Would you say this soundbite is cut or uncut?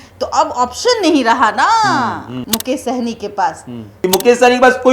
cut